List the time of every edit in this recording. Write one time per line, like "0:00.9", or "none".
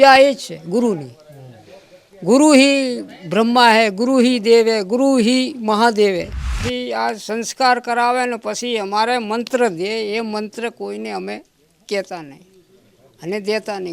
0:06.6